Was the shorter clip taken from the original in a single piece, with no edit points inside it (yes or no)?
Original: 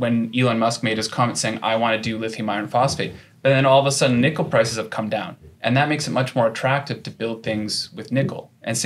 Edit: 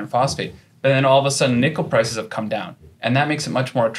yes